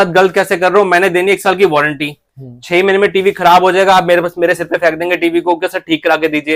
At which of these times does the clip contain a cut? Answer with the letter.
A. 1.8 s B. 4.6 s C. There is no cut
C